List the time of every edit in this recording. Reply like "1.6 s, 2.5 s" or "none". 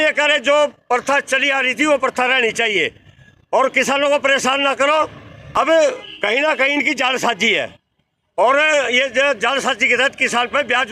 5.6 s